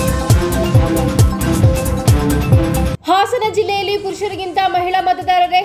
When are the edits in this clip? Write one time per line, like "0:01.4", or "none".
0:02.9